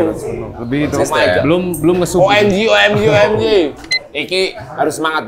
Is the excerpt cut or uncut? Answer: cut